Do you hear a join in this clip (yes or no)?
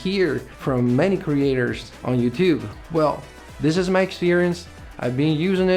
no